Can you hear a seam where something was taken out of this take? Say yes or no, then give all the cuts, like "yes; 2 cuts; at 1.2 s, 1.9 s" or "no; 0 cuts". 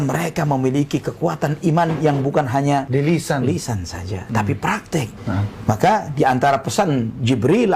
no; 0 cuts